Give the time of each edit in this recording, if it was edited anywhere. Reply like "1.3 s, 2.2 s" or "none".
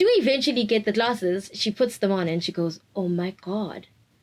none